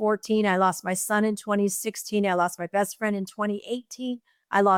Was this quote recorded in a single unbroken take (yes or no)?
yes